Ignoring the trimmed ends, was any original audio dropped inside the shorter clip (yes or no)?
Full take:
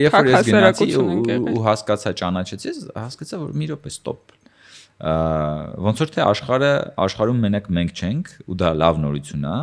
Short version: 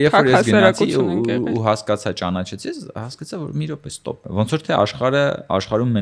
yes